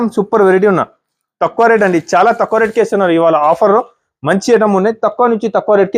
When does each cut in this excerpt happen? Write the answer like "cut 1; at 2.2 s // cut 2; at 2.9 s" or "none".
none